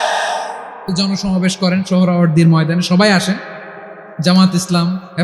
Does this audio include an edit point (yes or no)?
yes